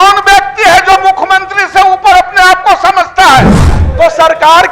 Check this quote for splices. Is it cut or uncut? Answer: cut